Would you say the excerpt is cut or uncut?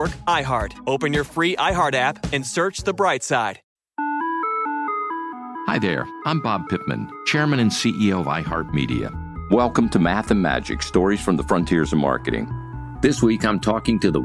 cut